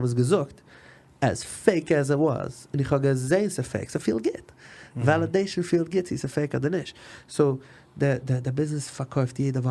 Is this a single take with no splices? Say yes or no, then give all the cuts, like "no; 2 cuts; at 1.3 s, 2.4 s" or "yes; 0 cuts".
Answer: yes; 0 cuts